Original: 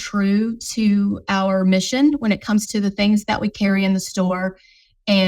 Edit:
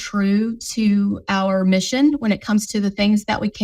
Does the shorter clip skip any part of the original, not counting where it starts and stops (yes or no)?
no